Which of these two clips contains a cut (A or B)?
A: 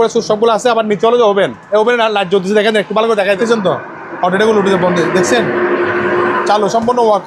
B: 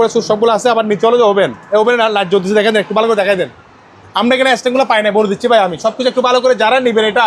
A